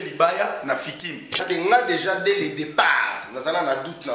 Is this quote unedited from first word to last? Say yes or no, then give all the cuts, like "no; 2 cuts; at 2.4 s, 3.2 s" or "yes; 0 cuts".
no; 1 cut; at 1.4 s